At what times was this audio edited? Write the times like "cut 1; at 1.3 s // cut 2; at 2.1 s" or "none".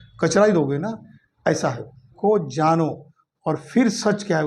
cut 1; at 2.1 s